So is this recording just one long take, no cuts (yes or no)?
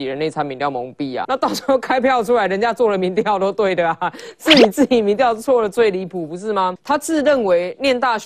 no